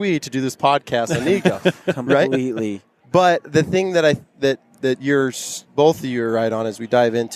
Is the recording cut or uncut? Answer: uncut